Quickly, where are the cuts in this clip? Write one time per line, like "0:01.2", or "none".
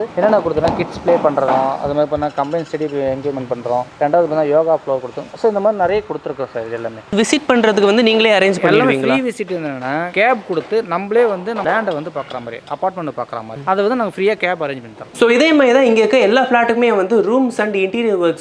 0:07.1
0:15.1